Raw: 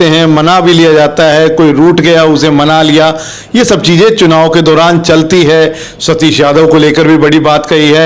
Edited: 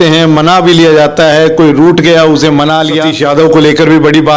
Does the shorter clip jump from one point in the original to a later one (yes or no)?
yes